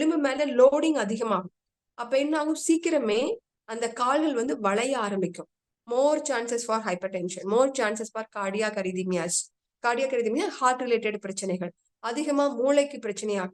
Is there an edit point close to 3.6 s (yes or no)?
no